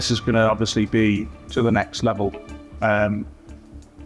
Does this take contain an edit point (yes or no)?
no